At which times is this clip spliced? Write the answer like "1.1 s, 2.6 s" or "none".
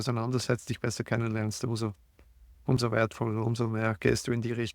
none